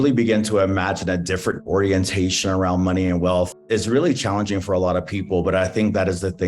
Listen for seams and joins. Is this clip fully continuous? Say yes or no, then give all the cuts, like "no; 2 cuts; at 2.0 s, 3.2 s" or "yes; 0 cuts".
no; 2 cuts; at 1.6 s, 3.7 s